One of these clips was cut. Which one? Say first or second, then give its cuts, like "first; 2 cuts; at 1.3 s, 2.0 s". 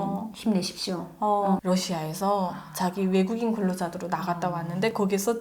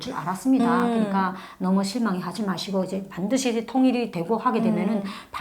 first; 1 cut; at 1.6 s